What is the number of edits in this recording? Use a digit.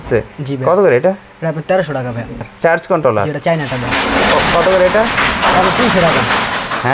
1